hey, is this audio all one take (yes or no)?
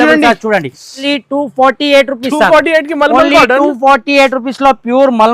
no